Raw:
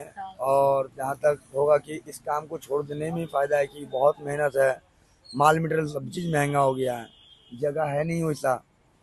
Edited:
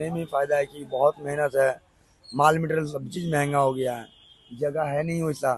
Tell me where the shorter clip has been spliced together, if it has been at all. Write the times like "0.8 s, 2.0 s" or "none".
none